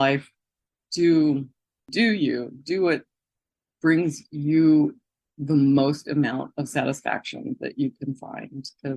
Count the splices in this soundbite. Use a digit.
1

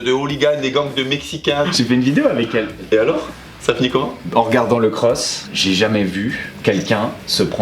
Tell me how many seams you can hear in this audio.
2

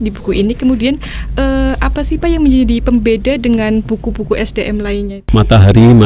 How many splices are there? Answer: 1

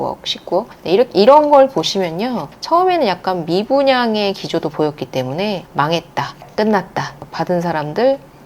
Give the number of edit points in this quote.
2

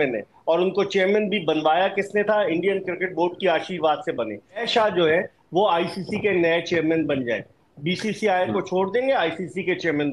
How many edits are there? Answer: 1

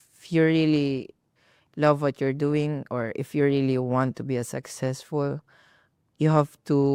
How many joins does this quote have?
0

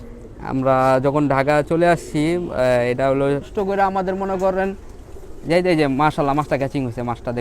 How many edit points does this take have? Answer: 1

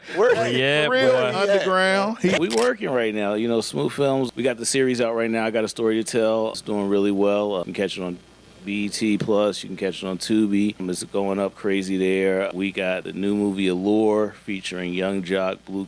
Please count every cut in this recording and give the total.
6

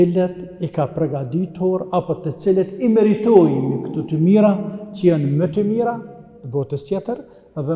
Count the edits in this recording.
0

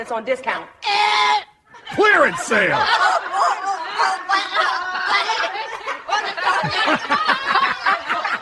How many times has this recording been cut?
0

